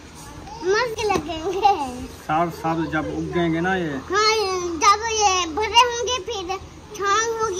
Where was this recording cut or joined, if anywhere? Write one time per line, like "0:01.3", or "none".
0:00.9